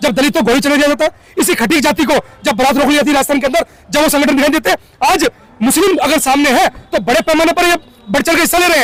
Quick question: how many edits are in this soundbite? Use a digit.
0